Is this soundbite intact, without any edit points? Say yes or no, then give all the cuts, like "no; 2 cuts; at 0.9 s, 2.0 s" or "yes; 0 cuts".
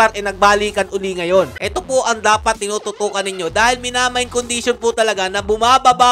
no; 1 cut; at 1.6 s